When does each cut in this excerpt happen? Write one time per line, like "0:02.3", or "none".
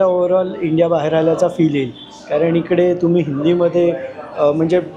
none

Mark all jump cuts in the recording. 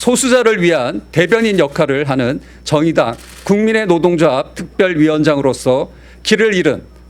0:01.0

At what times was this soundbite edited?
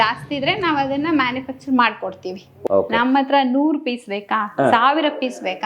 0:02.6

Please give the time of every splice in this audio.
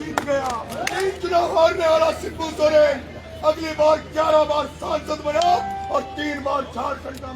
0:00.9

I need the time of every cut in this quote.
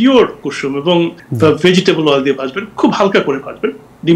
0:01.2

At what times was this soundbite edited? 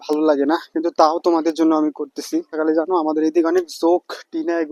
0:02.6

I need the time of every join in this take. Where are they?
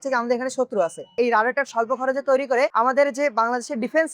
0:01.1

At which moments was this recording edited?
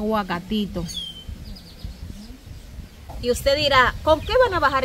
0:03.0

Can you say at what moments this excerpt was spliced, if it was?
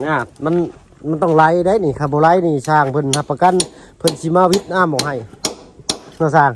none

